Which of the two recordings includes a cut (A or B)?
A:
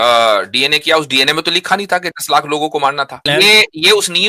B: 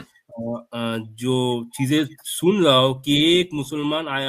A